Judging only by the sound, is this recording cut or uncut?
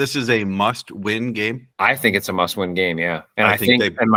uncut